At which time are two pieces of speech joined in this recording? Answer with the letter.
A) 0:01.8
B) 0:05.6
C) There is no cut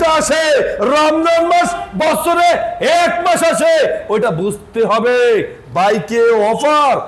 C